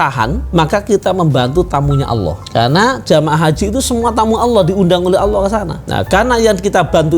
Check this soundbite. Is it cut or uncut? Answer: cut